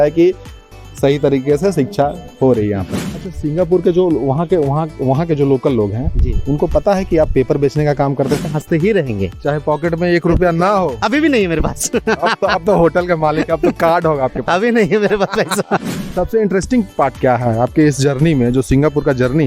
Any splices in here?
yes; 3 cuts; at 2.9 s, 8.5 s, 16.0 s

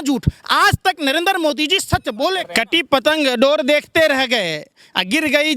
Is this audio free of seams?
no; 1 cut; at 2.5 s

